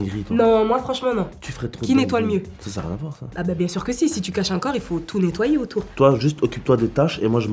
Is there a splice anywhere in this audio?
no; 0 cuts

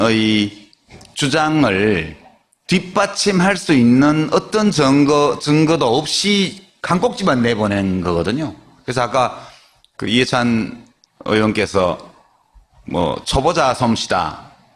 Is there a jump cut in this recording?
yes; 1 cut; at 3.6 s

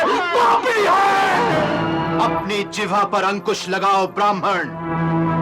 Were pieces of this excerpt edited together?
no; 0 cuts

